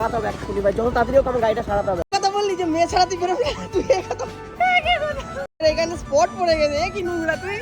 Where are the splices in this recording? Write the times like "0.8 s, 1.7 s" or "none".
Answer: 2.1 s, 5.6 s